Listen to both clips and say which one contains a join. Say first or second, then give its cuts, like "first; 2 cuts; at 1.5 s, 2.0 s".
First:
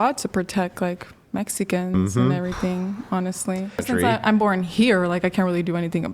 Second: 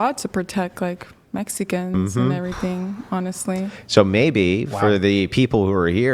first; 1 cut; at 3.9 s